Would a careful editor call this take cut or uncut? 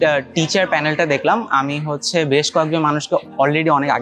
uncut